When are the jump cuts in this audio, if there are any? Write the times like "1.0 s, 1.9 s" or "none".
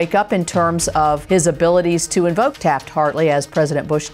1.2 s, 2.5 s